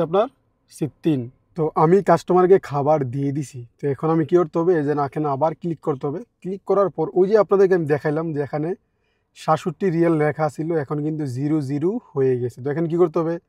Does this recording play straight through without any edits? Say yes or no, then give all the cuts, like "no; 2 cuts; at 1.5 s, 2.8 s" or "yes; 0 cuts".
yes; 0 cuts